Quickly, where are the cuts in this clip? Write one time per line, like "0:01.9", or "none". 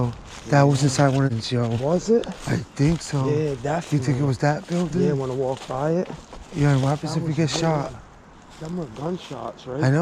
0:01.3